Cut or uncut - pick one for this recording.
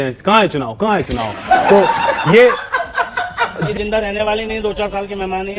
cut